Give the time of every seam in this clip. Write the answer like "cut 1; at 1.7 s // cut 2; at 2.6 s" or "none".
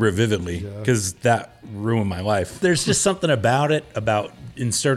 cut 1; at 2.5 s